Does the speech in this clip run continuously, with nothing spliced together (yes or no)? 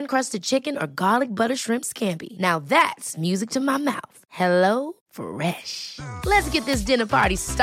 yes